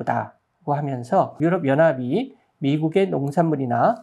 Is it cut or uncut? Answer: cut